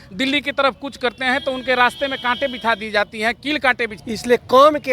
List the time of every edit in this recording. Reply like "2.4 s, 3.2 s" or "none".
3.9 s